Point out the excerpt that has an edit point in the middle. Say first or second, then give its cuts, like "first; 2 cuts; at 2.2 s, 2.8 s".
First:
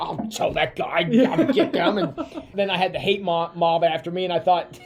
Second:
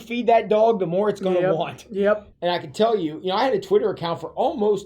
second; 1 cut; at 2.3 s